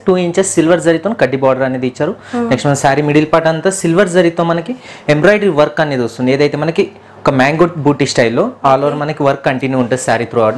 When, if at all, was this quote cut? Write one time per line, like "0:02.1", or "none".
none

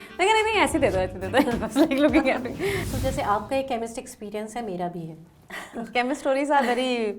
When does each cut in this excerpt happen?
0:02.8

